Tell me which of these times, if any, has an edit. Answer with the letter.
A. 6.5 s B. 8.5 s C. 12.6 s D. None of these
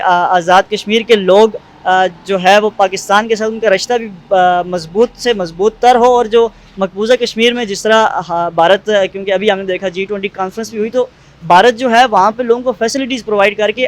D